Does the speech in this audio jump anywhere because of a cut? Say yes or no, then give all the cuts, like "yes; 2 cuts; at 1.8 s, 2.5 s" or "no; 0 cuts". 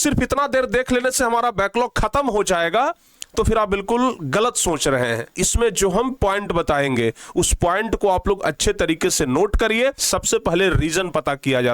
yes; 2 cuts; at 5.4 s, 10.0 s